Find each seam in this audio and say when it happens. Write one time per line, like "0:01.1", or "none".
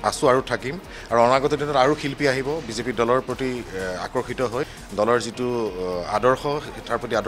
0:04.8